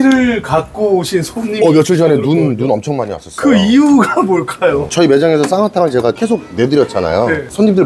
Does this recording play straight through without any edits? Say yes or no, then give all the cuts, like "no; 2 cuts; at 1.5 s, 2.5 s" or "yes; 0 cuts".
yes; 0 cuts